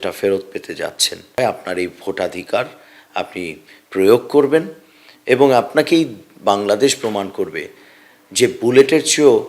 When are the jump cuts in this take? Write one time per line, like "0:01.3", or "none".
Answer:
0:01.4
0:05.7